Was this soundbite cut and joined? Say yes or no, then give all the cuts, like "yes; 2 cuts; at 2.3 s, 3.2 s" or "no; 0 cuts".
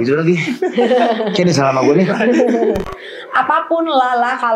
yes; 1 cut; at 2.8 s